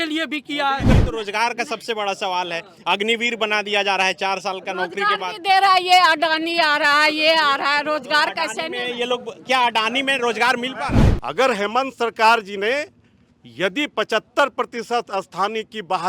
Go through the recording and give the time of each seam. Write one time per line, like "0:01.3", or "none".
0:01.0
0:11.0